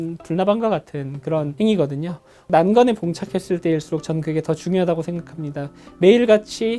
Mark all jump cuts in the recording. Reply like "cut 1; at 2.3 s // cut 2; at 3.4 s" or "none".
cut 1; at 1.5 s // cut 2; at 2.5 s